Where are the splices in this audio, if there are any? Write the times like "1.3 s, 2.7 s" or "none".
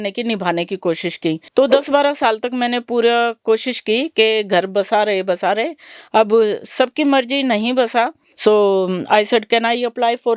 1.4 s, 8.2 s